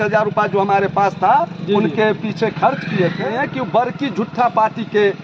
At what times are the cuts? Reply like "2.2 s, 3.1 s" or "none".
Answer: 3.2 s